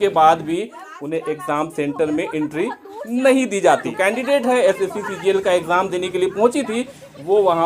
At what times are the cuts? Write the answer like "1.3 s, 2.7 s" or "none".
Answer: 3.9 s

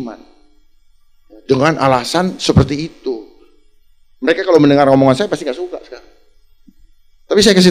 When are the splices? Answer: none

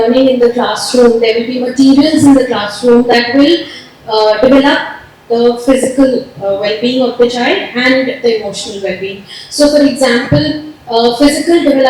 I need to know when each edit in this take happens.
none

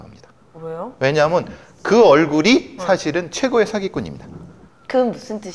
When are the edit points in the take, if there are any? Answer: none

